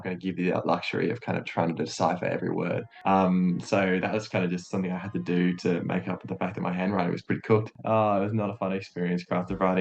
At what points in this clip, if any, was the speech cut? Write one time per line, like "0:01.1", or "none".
0:02.9
0:07.7